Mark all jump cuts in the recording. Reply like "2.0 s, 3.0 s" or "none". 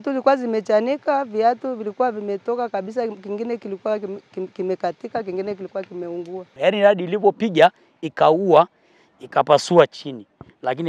6.6 s